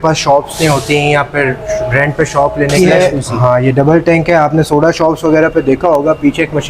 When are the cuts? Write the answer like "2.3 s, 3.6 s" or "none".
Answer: 2.7 s